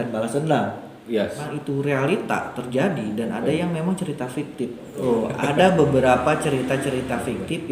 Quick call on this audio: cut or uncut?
cut